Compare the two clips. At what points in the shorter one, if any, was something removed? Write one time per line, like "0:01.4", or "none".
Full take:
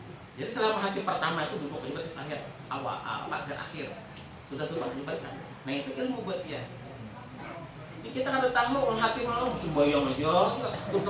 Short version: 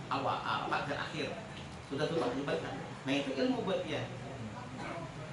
none